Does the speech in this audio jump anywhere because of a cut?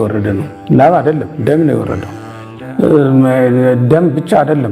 no; 0 cuts

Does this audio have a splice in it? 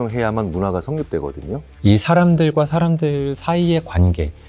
yes; 1 cut; at 1.7 s

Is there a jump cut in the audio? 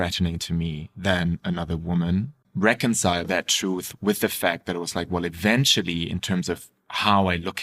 yes; 2 cuts; at 2.4 s, 3.3 s

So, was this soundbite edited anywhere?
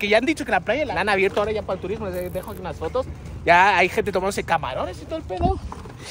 yes; 1 cut; at 0.9 s

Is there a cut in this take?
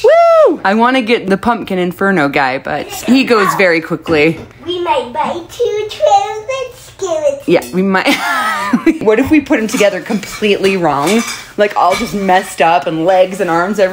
yes; 4 cuts; at 1.1 s, 3.0 s, 4.4 s, 9.0 s

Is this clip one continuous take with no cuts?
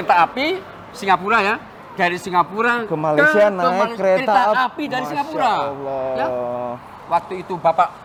yes; 0 cuts

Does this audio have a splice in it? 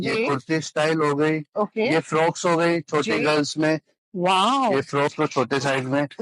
yes; 1 cut; at 5.1 s

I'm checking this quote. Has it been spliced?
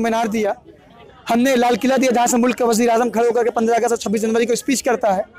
no; 0 cuts

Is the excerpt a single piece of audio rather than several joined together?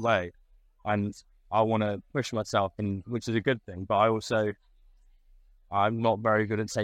yes; 0 cuts

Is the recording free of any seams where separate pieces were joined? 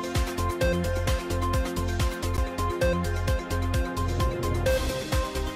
no; 1 cut; at 1.1 s

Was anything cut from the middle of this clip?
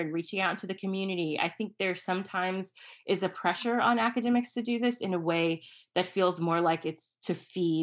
no; 0 cuts

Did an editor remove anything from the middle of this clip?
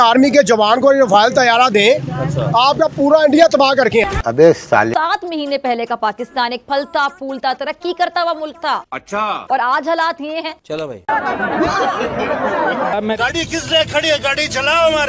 yes; 1 cut; at 4.9 s

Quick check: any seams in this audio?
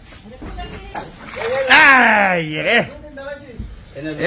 yes; 1 cut; at 1.0 s

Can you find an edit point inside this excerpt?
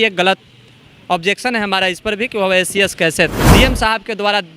yes; 1 cut; at 3.4 s

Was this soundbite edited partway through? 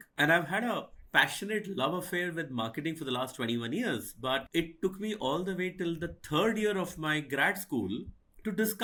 no; 0 cuts

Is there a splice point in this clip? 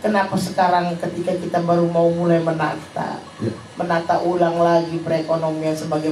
no; 0 cuts

